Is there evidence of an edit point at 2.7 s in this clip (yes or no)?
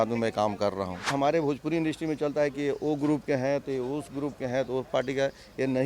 no